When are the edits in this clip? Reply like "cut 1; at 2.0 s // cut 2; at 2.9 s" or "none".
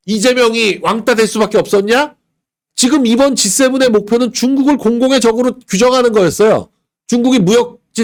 none